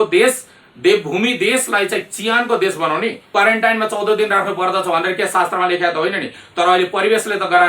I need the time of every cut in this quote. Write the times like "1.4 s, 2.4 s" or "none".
3.2 s